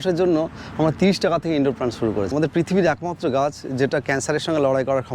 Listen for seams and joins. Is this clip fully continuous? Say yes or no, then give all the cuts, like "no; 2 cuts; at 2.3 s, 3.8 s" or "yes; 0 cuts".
no; 1 cut; at 2.3 s